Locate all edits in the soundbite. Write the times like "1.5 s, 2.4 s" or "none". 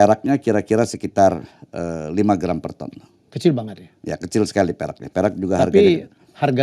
none

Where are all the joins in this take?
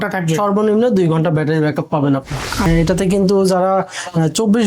2.7 s

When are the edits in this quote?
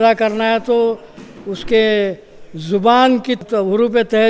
3.4 s

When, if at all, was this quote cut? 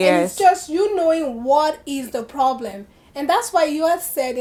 none

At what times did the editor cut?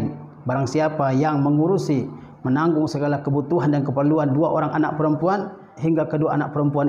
5.7 s

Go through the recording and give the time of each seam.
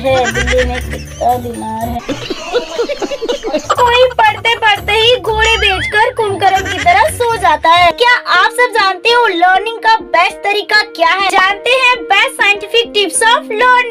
none

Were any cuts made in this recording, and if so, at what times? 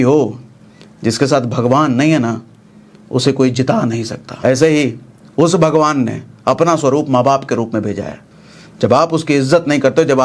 4.2 s

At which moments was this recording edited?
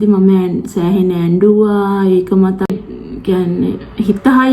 2.8 s

